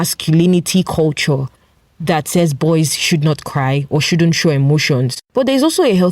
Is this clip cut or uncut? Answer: cut